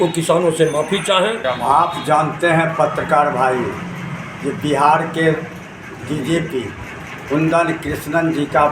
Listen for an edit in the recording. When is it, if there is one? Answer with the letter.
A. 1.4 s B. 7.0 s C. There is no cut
A